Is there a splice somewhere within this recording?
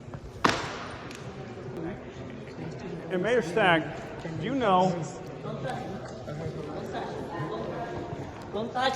yes; 1 cut; at 1.6 s

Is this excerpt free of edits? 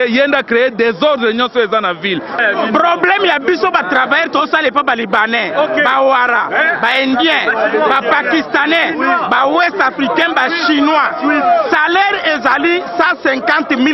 no; 1 cut; at 2.4 s

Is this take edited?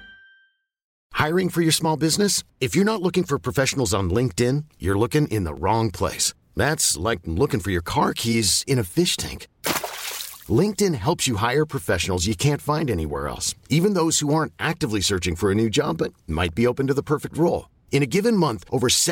yes; 1 cut; at 1.0 s

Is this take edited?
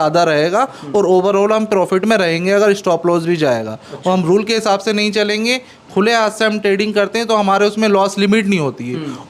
no; 0 cuts

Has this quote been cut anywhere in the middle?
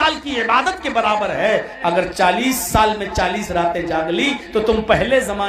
yes; 1 cut; at 1.7 s

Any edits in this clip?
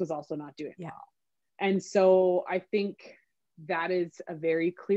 no; 0 cuts

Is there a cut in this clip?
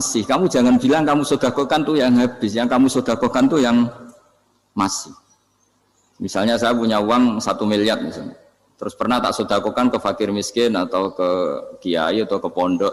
no; 0 cuts

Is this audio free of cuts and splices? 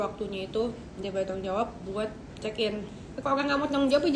no; 1 cut; at 3.0 s

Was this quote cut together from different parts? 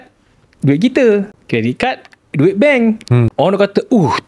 yes; 2 cuts; at 1.3 s, 3.3 s

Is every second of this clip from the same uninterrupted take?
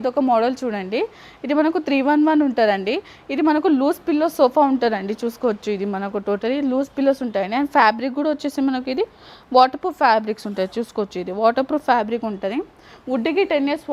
yes; 0 cuts

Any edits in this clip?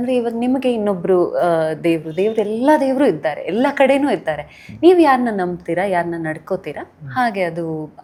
no; 0 cuts

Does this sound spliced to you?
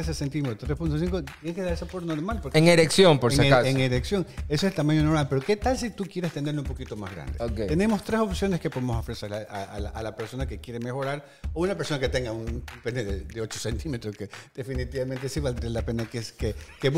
no; 0 cuts

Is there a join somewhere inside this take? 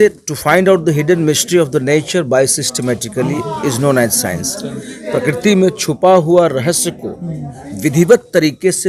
no; 0 cuts

